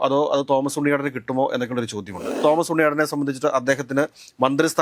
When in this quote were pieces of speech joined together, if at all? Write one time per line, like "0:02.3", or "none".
0:02.2